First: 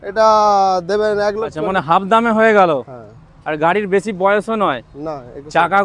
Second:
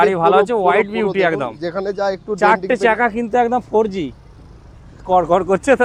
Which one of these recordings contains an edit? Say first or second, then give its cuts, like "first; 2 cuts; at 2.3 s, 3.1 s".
first; 1 cut; at 1.6 s